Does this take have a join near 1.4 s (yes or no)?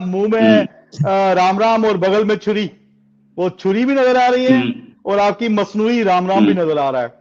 no